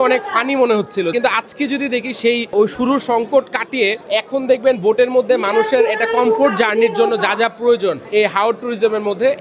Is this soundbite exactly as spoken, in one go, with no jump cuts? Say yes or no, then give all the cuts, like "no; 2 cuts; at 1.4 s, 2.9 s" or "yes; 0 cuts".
no; 2 cuts; at 4.0 s, 8.0 s